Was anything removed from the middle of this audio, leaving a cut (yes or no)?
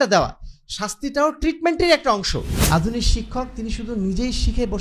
yes